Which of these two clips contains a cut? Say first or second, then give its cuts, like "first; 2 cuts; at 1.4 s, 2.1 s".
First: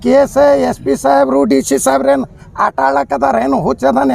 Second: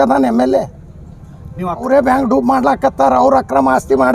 second; 1 cut; at 1.8 s